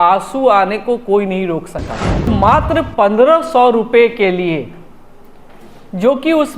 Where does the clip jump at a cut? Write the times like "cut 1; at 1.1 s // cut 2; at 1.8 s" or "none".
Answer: cut 1; at 2.3 s